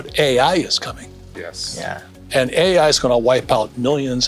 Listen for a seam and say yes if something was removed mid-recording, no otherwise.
no